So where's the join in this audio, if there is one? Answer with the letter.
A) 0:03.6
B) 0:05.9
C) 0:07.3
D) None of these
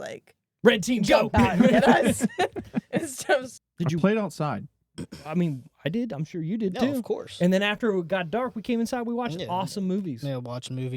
A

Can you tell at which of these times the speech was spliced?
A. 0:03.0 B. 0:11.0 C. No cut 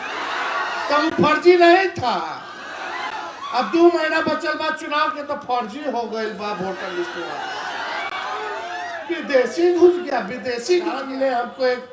B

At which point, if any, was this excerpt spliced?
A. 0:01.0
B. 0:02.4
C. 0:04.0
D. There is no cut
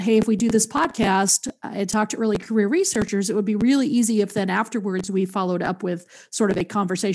B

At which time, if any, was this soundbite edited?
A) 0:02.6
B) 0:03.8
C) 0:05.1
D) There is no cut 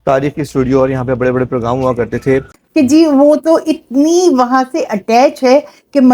A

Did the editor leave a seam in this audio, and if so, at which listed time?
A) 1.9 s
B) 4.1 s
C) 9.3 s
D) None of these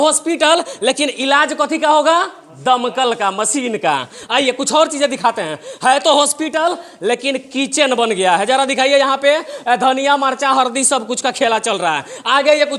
D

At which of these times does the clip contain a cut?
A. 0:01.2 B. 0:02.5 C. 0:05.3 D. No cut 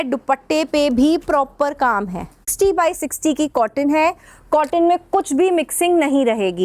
B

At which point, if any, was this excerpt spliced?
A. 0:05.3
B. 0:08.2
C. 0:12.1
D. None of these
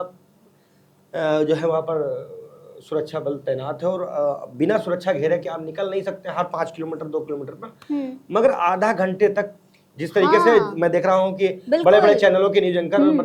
D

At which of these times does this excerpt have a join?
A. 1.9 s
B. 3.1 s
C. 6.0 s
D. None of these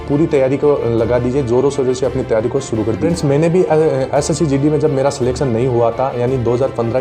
B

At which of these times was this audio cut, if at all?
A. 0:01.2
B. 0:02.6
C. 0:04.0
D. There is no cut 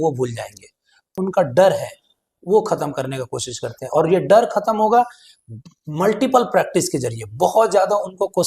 A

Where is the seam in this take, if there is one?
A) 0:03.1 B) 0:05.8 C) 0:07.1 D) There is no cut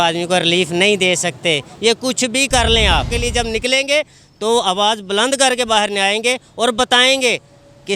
A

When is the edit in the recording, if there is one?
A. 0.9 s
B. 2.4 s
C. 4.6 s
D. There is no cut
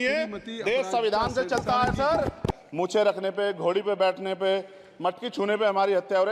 B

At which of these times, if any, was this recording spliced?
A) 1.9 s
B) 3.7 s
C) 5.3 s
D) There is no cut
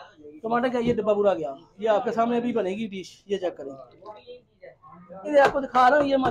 C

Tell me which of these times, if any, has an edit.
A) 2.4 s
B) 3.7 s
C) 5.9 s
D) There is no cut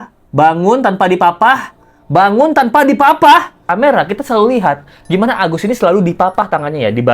B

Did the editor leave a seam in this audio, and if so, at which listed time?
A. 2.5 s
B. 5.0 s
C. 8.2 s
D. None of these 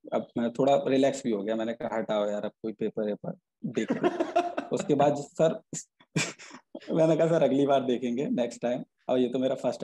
D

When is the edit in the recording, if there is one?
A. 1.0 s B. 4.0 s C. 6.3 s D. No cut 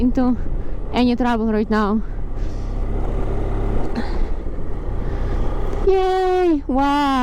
D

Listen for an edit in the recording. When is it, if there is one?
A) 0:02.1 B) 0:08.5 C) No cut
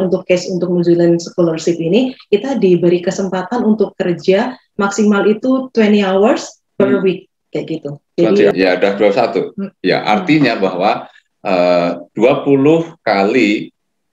B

